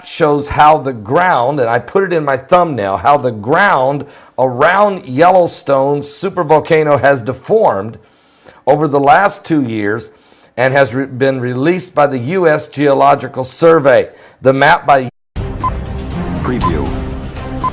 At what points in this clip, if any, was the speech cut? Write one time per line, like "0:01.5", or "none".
none